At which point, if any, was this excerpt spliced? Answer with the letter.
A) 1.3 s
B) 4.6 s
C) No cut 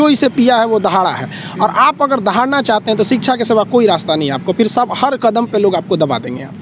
C